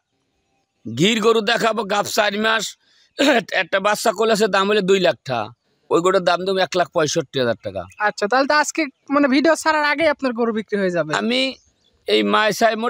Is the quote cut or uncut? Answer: uncut